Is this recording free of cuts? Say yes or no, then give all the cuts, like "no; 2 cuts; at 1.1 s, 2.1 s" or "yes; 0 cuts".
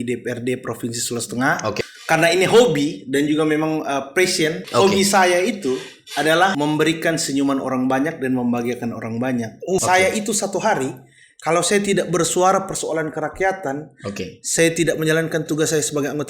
no; 3 cuts; at 1.8 s, 4.6 s, 9.8 s